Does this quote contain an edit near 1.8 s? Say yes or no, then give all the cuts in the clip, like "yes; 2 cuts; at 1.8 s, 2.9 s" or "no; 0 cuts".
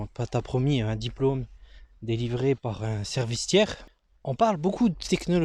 no; 1 cut; at 3.9 s